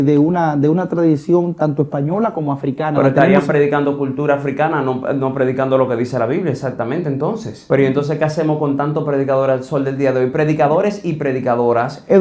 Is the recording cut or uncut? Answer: cut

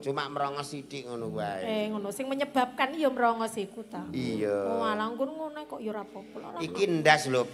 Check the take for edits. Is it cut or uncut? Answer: uncut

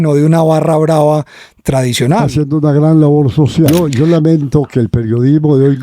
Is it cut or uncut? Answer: cut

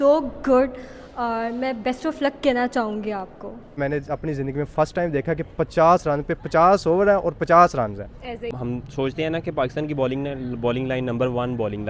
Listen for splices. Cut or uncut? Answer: cut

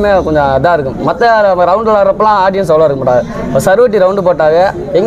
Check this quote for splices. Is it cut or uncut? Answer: uncut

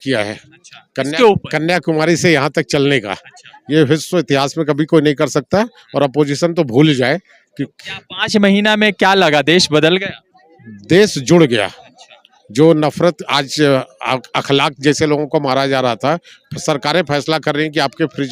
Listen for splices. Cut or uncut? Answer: uncut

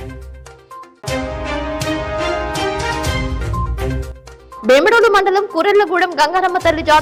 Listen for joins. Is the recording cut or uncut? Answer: uncut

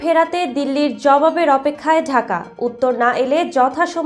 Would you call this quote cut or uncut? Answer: uncut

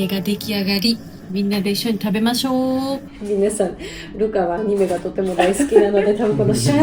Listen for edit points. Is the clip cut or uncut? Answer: uncut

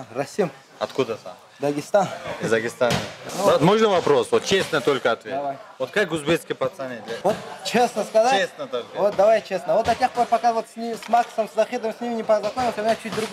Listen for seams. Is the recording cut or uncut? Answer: cut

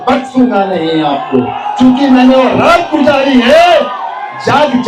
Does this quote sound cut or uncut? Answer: uncut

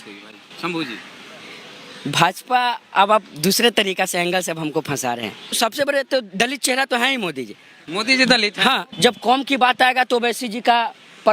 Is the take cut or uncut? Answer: cut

